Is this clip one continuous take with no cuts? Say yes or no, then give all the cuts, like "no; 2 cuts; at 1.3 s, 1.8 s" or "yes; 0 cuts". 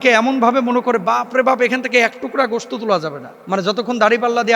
no; 1 cut; at 3.3 s